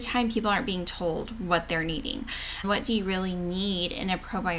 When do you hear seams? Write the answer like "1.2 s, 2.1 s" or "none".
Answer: 2.6 s